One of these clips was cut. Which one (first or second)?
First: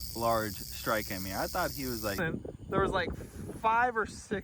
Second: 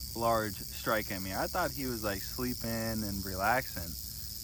first